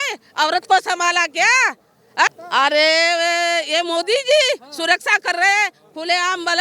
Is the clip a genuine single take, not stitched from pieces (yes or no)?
no